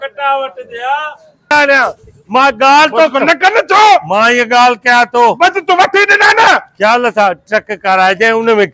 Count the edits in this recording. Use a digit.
1